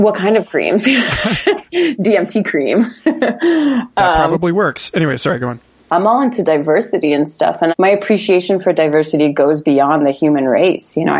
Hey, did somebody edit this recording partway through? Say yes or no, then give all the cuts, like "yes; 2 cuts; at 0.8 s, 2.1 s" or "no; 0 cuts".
yes; 1 cut; at 5.7 s